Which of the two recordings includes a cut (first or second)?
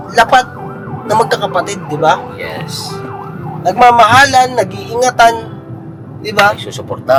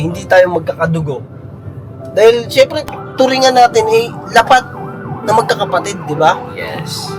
second